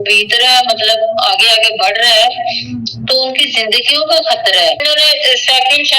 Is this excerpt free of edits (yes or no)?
no